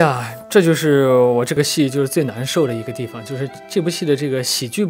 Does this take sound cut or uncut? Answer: uncut